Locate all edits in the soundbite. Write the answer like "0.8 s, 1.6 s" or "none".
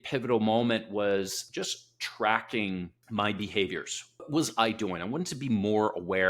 1.4 s, 3.0 s, 4.3 s